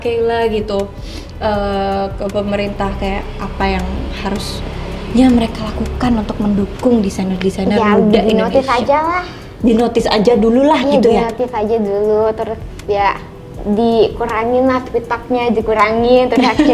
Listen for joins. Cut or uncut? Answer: uncut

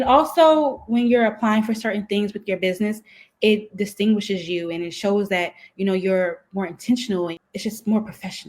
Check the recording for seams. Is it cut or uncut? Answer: cut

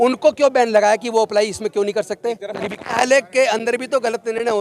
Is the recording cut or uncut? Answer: cut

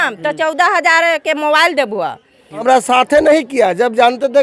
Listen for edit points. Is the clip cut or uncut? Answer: cut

